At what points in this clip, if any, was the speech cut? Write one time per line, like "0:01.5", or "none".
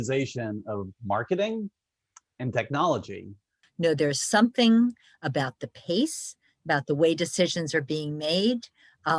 0:03.6